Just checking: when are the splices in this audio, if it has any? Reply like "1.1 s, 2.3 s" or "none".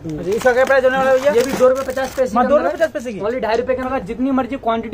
3.8 s